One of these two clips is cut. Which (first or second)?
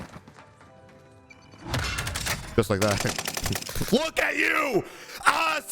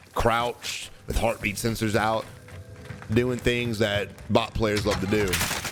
first